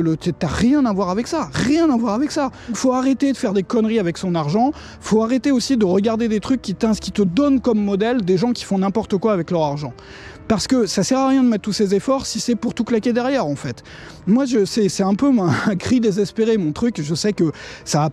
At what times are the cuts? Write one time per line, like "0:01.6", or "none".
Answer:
0:02.8